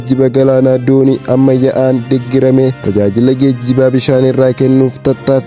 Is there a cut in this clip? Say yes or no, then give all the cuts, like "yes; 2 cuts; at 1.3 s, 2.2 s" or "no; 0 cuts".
yes; 1 cut; at 2.8 s